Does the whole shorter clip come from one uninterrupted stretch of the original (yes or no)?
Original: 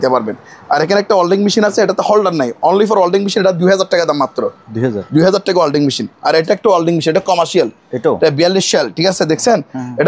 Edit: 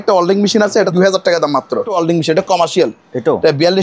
no